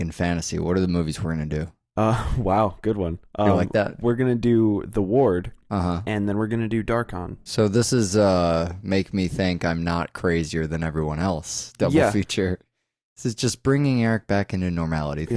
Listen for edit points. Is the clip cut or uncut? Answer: cut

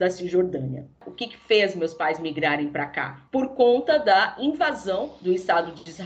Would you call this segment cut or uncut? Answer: uncut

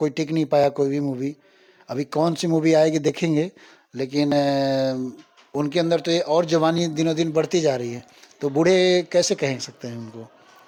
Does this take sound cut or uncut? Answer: uncut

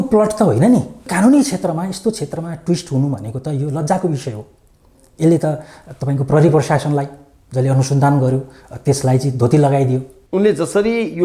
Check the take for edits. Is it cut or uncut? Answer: cut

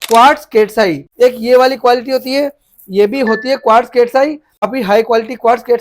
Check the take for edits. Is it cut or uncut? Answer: cut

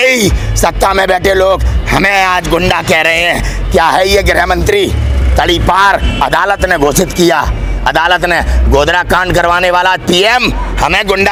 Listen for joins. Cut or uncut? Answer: uncut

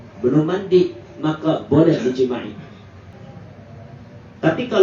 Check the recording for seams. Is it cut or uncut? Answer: cut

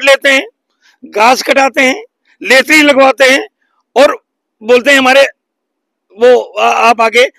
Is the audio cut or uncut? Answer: uncut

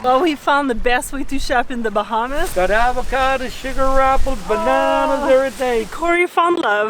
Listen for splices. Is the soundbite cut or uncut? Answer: cut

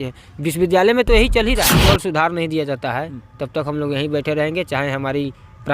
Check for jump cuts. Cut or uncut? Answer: cut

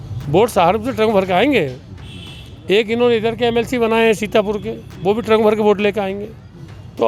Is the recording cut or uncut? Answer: uncut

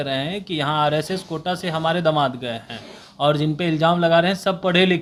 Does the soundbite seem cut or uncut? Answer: uncut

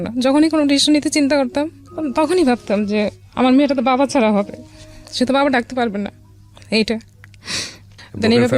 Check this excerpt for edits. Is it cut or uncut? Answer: uncut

